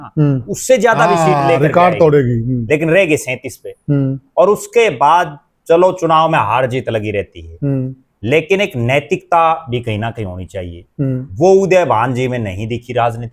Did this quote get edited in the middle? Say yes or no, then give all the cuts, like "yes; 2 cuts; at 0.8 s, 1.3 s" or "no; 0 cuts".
no; 0 cuts